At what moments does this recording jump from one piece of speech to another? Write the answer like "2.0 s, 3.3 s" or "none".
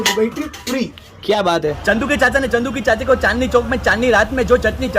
1.8 s